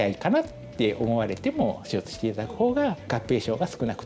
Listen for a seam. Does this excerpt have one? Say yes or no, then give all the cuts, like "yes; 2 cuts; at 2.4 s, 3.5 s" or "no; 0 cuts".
no; 0 cuts